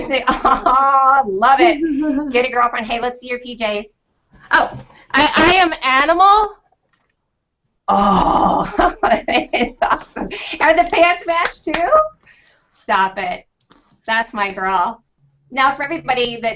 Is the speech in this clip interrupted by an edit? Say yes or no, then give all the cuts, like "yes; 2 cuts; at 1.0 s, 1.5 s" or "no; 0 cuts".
yes; 1 cut; at 9.7 s